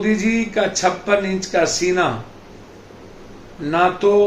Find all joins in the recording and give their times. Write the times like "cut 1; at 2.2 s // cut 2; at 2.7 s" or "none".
none